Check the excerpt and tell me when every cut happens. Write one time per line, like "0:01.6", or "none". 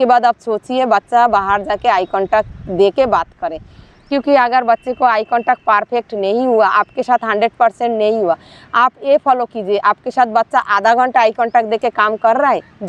none